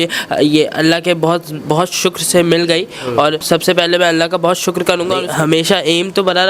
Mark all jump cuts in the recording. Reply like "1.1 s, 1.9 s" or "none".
3.4 s, 5.3 s